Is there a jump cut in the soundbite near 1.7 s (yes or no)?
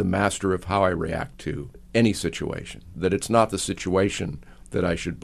yes